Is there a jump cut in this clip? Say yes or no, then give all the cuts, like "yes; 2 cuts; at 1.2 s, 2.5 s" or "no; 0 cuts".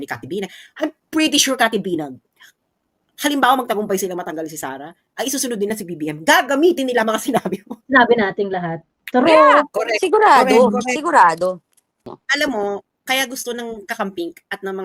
yes; 1 cut; at 12.1 s